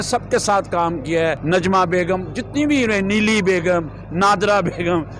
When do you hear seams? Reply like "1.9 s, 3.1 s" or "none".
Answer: 1.4 s